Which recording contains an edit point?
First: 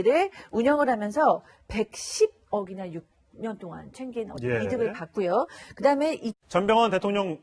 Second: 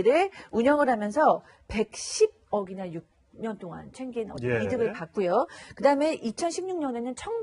second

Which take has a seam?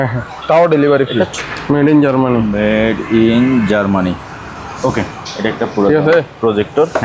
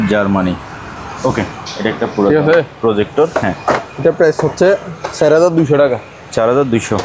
first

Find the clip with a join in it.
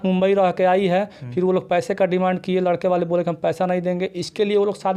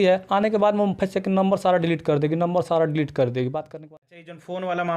second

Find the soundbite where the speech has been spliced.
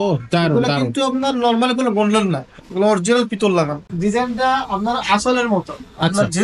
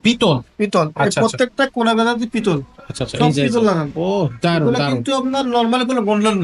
first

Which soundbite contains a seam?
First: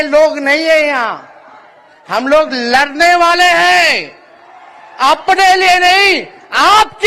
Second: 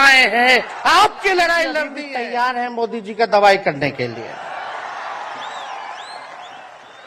second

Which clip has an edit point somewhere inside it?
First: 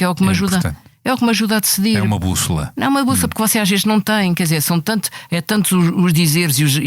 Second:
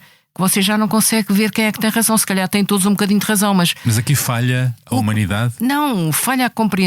second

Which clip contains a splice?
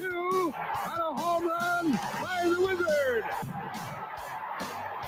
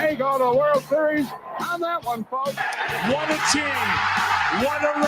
second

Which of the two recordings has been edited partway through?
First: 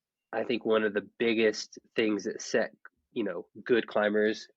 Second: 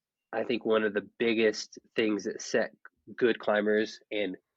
second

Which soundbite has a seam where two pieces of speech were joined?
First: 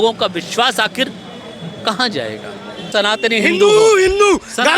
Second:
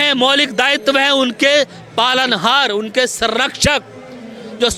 first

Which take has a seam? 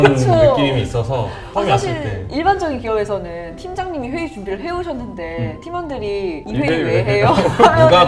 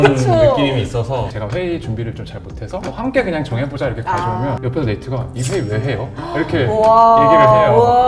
second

